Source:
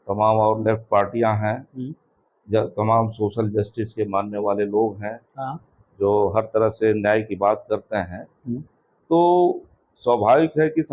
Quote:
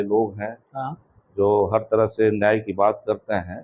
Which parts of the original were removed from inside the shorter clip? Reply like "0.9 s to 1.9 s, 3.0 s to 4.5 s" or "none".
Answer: none